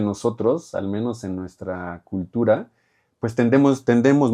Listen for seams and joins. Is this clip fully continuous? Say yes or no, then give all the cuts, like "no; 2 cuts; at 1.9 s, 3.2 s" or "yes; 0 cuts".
yes; 0 cuts